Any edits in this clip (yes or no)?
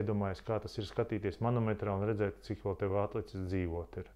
no